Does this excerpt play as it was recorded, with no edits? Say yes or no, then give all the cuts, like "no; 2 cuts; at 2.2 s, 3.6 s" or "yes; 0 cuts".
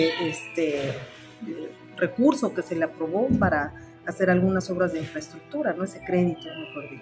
yes; 0 cuts